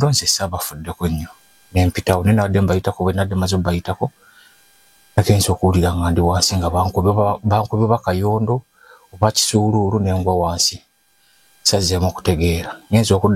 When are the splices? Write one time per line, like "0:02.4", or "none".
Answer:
none